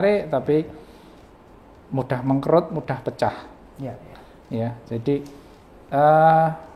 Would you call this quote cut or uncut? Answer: uncut